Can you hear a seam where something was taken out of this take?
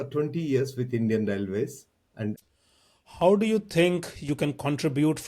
yes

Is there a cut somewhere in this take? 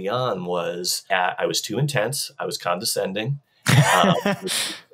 yes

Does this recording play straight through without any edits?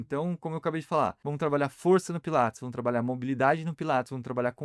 no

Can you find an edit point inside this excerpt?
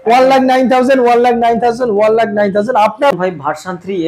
yes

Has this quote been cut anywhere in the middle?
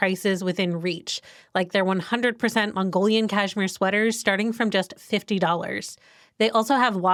no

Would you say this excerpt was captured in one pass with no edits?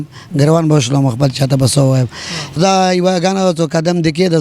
no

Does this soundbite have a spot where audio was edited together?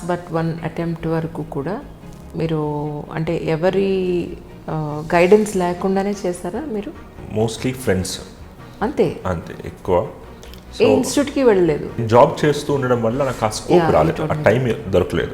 yes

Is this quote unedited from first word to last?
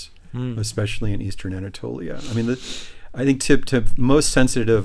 yes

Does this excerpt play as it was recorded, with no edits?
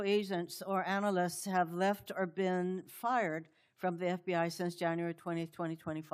yes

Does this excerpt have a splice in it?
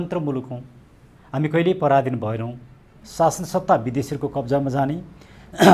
yes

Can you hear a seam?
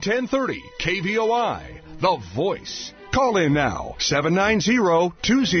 no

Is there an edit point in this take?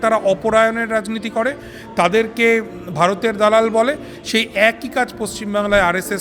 no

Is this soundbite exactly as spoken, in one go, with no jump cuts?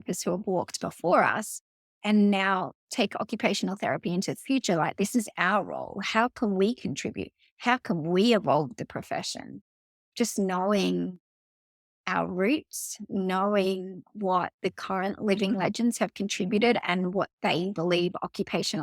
no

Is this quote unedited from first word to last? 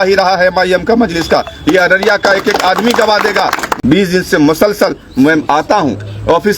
no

